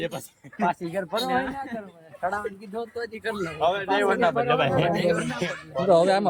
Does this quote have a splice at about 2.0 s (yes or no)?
no